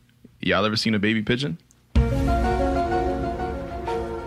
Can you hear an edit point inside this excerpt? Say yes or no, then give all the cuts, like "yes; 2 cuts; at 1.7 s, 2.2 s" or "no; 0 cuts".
no; 0 cuts